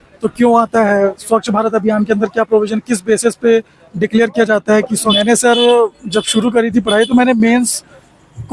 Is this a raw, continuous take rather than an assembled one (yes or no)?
no